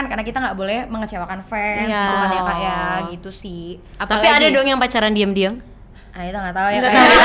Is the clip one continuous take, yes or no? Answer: yes